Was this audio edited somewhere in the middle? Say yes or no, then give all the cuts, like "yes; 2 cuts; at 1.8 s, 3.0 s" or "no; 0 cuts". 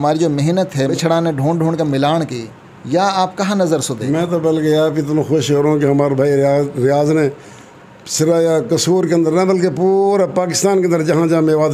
no; 0 cuts